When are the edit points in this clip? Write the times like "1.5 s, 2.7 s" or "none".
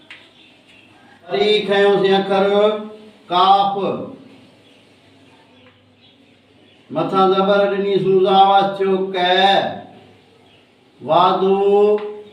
1.3 s